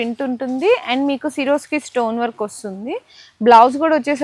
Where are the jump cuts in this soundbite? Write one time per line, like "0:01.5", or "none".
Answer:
none